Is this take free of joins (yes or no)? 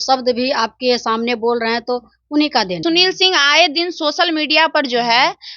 no